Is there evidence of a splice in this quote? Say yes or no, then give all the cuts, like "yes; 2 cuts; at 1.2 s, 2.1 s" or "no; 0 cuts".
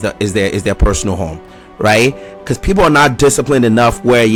no; 0 cuts